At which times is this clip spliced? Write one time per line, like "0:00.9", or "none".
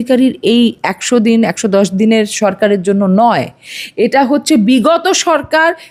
none